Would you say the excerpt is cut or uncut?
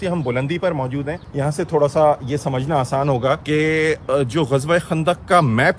cut